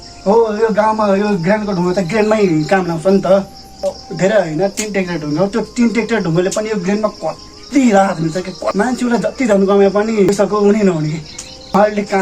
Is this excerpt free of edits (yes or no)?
no